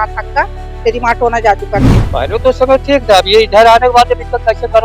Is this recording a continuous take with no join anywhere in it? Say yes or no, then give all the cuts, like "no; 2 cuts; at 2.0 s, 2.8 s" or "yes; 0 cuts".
no; 1 cut; at 1.9 s